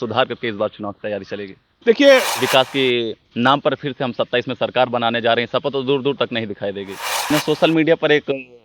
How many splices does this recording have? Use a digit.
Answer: 2